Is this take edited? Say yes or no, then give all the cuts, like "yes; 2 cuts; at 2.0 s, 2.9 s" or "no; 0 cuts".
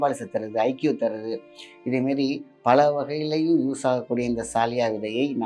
no; 0 cuts